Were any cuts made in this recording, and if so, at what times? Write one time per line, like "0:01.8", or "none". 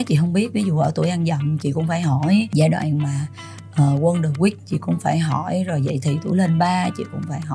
0:02.5